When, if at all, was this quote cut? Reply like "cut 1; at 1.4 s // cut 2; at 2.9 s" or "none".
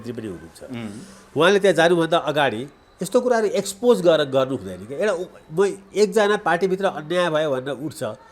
none